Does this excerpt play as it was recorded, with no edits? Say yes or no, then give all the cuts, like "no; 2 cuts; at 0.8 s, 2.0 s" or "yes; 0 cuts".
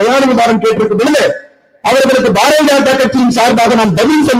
yes; 0 cuts